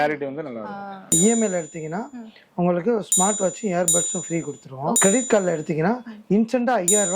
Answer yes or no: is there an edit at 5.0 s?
yes